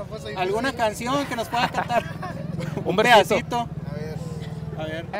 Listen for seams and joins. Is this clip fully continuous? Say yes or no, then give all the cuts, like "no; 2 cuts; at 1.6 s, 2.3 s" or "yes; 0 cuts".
yes; 0 cuts